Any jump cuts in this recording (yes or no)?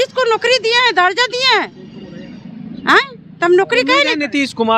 no